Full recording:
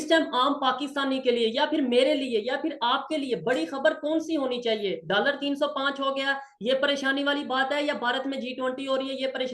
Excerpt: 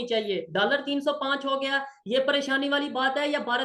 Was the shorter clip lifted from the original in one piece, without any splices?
yes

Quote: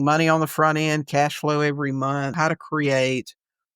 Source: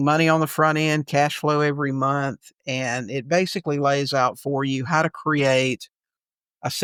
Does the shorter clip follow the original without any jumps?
no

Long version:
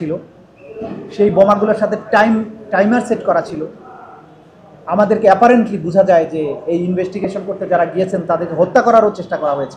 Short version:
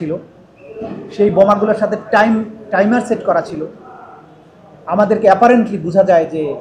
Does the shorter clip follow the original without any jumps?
yes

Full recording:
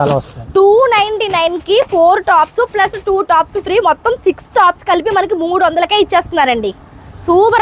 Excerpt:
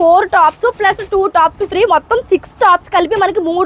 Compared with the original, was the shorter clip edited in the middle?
no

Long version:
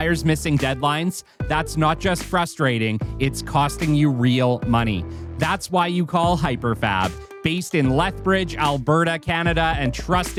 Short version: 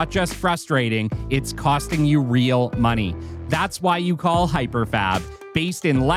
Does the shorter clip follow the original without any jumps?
yes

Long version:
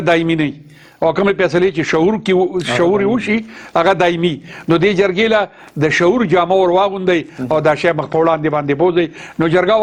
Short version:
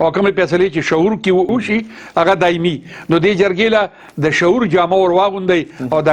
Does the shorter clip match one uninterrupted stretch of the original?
no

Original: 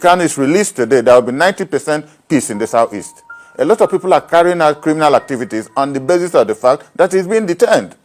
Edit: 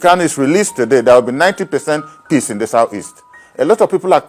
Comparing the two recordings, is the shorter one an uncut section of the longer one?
yes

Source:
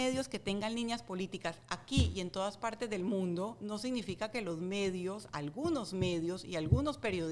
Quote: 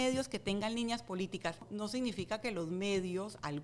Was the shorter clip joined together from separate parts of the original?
yes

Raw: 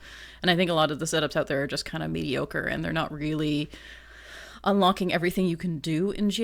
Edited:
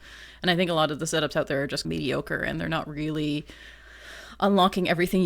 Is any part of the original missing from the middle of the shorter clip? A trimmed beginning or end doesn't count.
yes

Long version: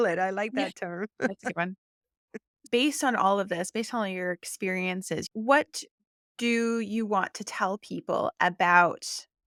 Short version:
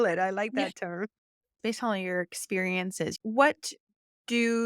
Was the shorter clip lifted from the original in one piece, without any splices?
no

